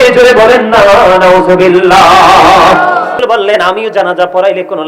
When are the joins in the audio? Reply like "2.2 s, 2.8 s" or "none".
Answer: 3.2 s